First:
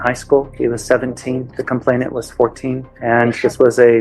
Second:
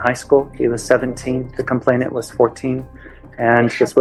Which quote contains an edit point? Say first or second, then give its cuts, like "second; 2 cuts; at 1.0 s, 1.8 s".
first; 1 cut; at 2.9 s